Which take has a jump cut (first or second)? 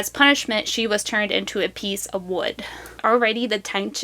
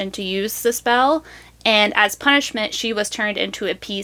first